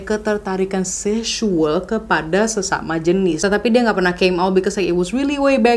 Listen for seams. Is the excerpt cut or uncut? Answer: uncut